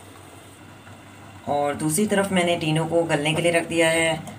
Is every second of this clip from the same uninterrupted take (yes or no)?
yes